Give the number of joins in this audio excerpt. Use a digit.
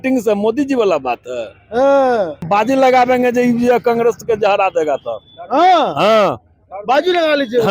1